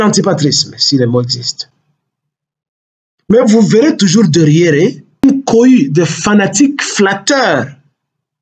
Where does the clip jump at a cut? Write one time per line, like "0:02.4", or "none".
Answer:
0:05.2